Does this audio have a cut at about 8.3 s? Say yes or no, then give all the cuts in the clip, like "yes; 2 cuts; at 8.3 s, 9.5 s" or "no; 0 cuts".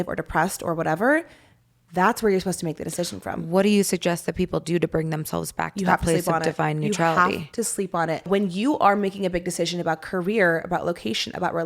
yes; 1 cut; at 8.3 s